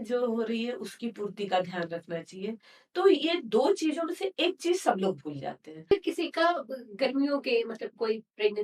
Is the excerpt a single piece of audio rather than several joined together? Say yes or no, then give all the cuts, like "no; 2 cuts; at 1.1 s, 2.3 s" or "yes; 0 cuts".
no; 1 cut; at 5.9 s